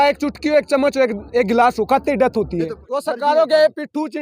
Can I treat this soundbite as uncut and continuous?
no; 1 cut; at 2.8 s

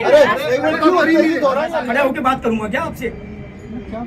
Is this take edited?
yes; 1 cut; at 1.8 s

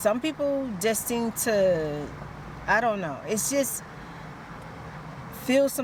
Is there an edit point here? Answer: no; 0 cuts

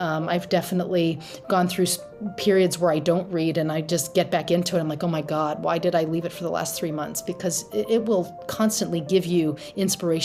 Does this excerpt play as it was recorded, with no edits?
yes; 0 cuts

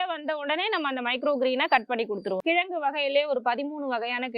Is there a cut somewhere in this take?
yes; 1 cut; at 2.4 s

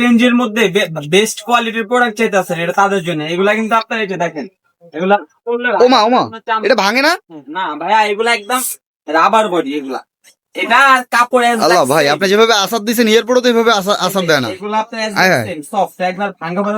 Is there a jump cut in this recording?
no; 0 cuts

